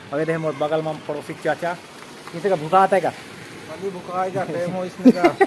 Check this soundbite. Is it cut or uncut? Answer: uncut